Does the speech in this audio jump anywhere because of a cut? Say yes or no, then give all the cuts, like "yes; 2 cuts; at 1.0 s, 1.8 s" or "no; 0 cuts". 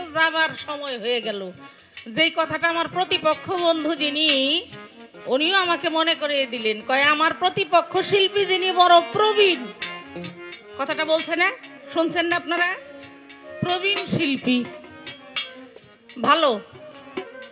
no; 0 cuts